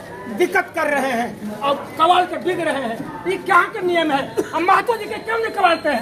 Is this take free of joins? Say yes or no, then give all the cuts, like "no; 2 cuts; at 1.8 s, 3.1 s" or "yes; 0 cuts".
yes; 0 cuts